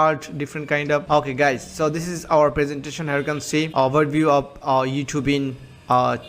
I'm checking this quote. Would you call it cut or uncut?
cut